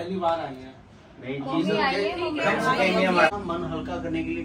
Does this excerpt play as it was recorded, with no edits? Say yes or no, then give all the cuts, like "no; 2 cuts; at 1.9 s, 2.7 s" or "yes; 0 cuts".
no; 1 cut; at 3.3 s